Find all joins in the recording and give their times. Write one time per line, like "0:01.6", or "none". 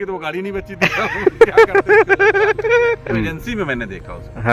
0:03.1